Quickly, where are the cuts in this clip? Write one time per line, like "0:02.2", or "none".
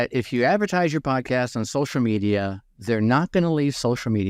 none